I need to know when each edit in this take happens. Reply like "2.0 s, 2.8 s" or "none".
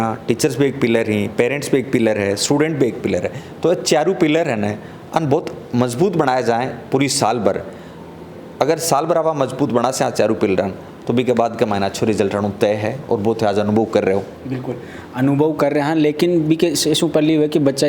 none